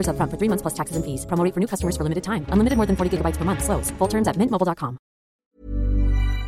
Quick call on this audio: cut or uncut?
cut